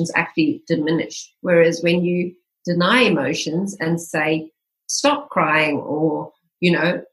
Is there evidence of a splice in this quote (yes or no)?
no